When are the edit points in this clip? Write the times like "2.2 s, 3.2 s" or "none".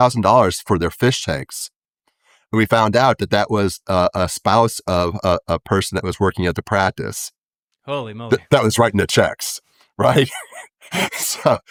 none